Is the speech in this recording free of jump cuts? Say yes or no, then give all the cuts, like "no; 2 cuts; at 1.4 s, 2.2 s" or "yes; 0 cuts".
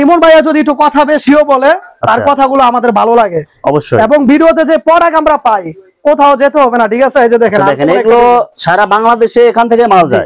yes; 0 cuts